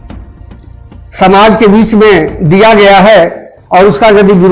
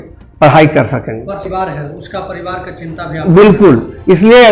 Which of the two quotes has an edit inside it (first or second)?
second